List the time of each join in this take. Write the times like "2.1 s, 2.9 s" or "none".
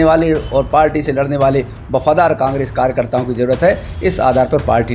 none